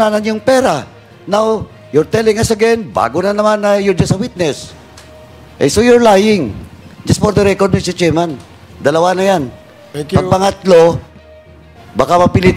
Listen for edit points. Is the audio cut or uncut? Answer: uncut